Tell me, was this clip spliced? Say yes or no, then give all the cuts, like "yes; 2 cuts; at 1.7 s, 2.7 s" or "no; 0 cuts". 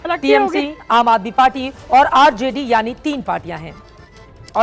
no; 0 cuts